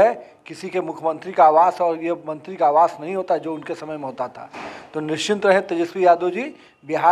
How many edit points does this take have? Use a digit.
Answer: 0